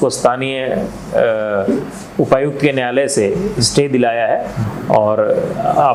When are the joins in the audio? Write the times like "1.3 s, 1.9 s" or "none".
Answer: none

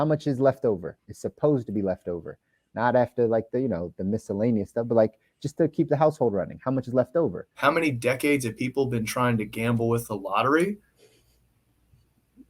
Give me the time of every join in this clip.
7.5 s

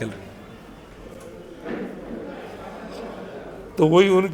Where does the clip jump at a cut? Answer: none

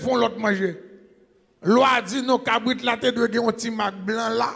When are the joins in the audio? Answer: none

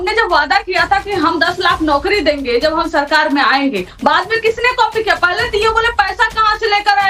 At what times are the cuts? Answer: none

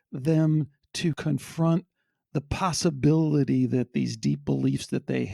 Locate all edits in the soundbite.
1.2 s

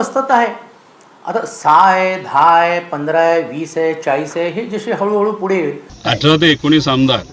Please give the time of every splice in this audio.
5.9 s

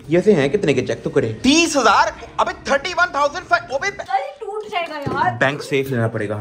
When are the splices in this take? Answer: 3.9 s

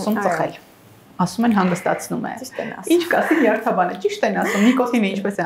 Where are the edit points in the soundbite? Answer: none

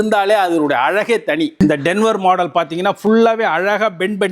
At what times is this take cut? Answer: 1.5 s

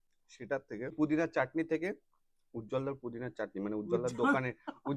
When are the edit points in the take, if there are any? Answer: 0.9 s

